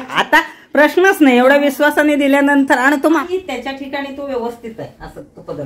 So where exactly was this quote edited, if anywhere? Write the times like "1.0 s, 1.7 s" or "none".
3.2 s